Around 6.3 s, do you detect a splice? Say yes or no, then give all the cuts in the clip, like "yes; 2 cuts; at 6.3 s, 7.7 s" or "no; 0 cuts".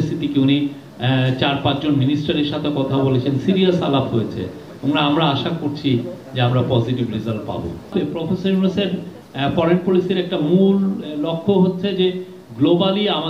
no; 1 cut; at 7.9 s